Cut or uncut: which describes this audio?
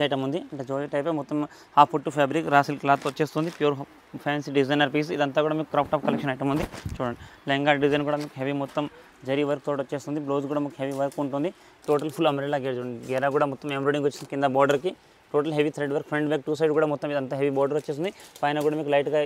uncut